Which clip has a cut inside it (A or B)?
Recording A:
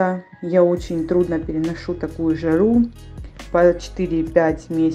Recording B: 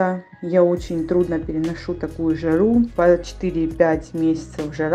B